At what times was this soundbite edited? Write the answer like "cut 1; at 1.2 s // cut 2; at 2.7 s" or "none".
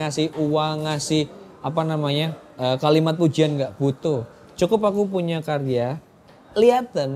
none